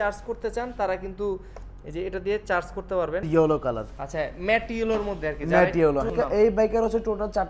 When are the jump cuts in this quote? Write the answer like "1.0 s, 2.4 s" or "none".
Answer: 3.3 s, 6.1 s